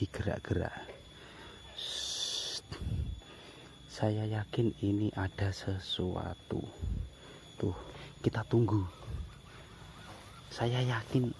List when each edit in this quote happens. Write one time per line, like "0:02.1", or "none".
0:07.9